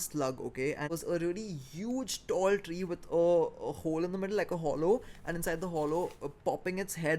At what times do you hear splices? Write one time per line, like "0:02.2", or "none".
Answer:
0:00.9